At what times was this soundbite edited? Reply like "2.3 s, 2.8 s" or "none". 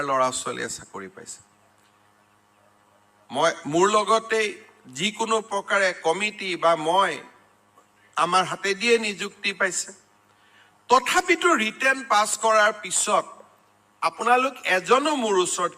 1.7 s